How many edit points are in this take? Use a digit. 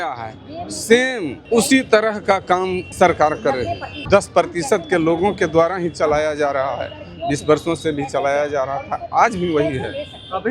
3